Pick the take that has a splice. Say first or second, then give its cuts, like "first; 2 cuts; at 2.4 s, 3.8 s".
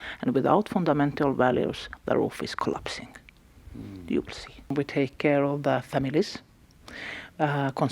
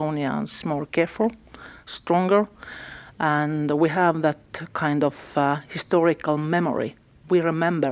first; 1 cut; at 4.7 s